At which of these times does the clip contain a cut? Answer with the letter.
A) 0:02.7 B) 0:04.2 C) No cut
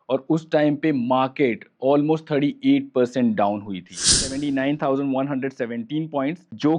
B